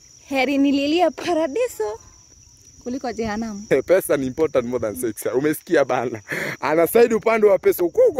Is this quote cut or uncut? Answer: cut